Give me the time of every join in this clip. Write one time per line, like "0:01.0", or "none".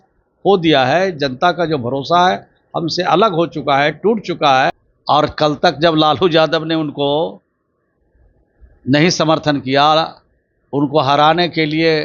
0:04.9

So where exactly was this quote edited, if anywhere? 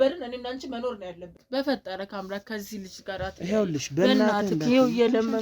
0:01.3

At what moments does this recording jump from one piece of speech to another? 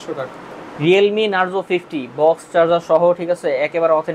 none

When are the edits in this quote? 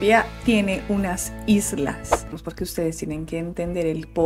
0:02.3

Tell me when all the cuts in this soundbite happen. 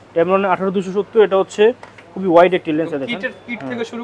none

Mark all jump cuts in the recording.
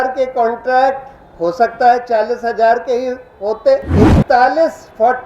0:03.9

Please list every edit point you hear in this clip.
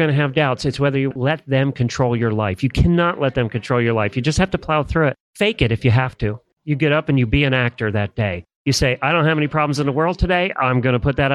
0:05.2
0:06.5

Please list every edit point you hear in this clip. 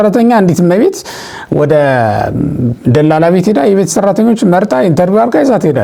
none

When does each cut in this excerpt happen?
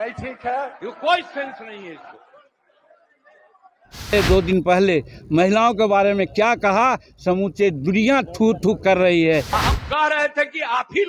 0:04.1
0:09.6

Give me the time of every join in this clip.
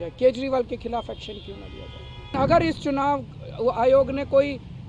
0:02.3

